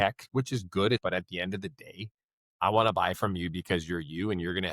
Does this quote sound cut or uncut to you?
cut